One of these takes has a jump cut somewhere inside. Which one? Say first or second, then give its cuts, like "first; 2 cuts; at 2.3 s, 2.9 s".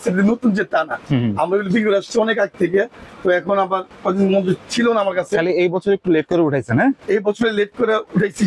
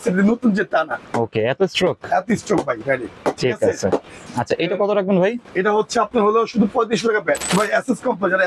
second; 3 cuts; at 1.0 s, 4.2 s, 7.4 s